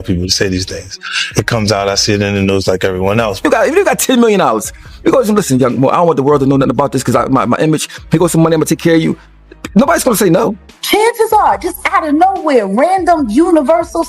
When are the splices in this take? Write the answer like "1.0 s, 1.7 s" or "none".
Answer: 3.4 s, 10.7 s